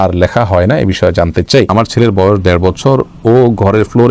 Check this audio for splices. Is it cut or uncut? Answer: cut